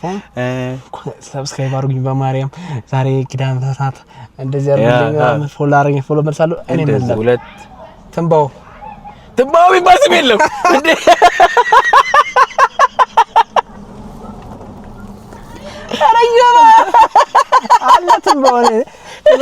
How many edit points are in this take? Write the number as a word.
one